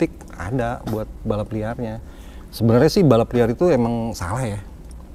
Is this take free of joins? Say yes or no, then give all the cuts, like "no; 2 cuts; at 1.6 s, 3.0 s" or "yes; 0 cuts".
yes; 0 cuts